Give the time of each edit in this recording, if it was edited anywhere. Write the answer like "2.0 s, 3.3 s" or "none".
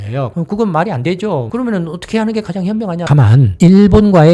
1.5 s, 2.9 s